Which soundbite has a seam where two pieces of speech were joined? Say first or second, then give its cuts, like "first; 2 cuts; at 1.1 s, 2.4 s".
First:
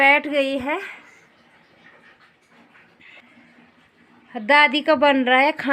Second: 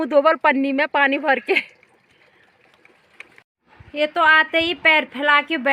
second; 1 cut; at 3.5 s